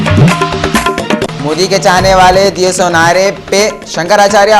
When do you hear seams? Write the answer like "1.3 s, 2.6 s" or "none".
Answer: none